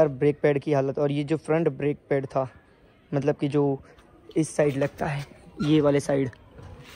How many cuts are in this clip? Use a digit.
0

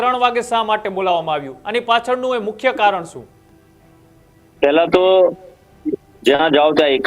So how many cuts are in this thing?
0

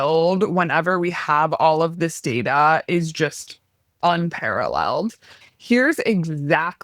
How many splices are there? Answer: 1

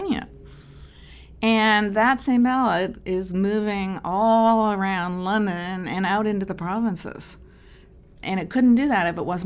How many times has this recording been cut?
1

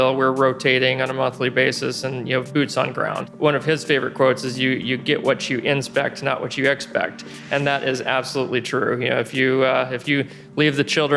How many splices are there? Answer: 1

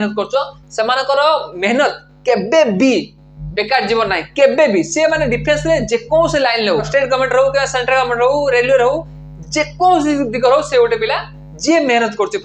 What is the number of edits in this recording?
1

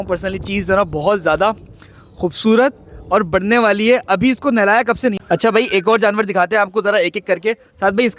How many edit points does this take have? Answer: 1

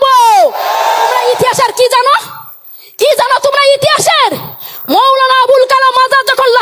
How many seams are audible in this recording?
1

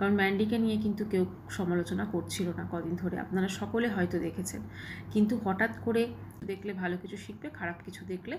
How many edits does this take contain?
1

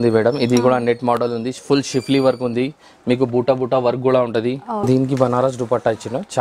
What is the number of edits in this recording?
1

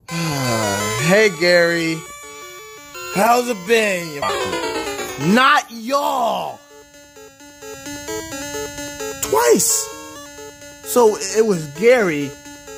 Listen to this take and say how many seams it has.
1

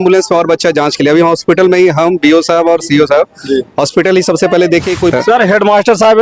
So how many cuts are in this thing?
1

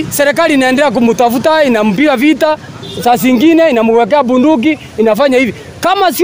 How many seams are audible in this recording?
0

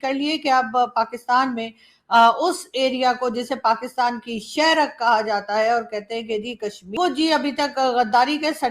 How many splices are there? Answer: 1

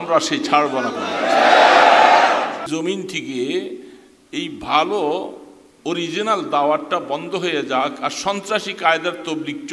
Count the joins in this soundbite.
1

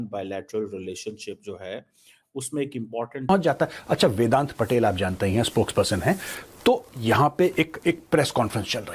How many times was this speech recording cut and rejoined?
1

